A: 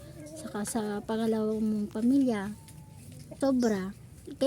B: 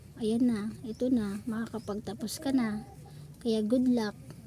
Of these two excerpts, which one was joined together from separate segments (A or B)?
A